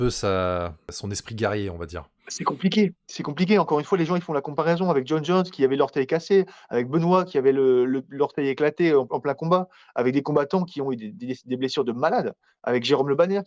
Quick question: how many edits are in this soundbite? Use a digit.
1